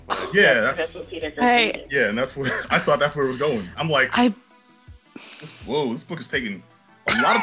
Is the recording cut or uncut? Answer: uncut